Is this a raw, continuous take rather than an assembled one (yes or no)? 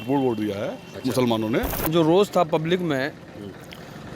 no